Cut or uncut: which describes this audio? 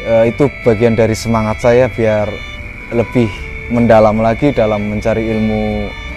uncut